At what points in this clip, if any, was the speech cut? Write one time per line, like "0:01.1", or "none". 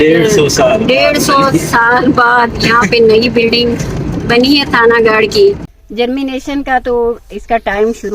0:05.6